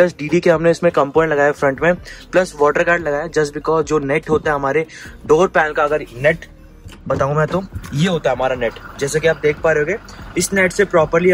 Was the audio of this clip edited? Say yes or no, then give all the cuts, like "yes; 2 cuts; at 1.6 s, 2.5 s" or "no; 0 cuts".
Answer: no; 0 cuts